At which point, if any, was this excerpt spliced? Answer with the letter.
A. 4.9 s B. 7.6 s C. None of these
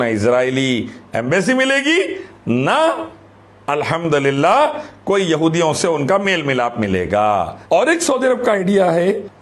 B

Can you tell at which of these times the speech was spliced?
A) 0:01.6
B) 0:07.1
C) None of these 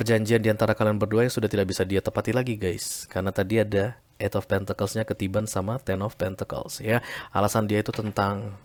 C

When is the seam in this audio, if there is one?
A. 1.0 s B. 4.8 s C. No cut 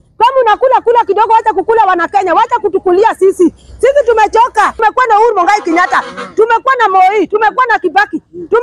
B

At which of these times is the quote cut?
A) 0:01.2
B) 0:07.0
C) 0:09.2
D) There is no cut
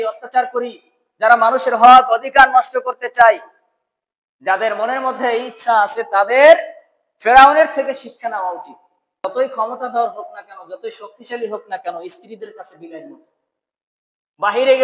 C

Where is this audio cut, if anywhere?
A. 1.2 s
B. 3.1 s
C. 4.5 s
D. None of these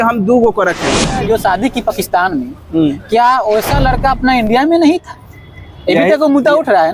A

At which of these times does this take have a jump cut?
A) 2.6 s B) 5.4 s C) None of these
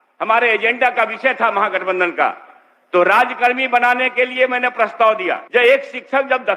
B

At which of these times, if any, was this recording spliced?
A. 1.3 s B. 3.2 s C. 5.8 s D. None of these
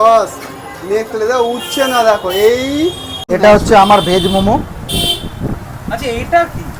B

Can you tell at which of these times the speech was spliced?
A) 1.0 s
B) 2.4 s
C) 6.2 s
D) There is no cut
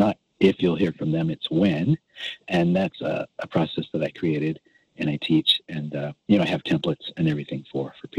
D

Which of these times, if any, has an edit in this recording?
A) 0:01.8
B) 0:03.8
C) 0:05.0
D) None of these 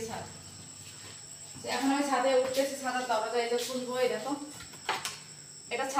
D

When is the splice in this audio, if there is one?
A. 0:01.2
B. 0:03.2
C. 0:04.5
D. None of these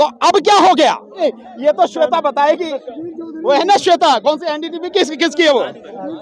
A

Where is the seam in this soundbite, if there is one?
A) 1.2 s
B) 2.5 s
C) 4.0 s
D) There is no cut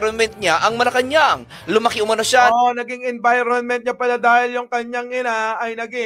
D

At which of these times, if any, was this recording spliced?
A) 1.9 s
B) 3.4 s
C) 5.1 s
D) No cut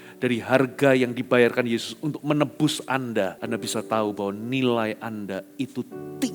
B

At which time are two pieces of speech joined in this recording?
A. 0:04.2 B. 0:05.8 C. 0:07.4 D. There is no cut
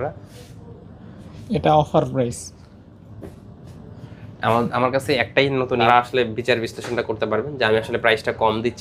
B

